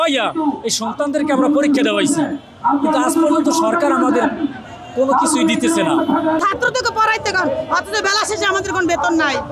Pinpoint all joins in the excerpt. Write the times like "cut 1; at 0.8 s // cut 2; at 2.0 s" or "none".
cut 1; at 6.4 s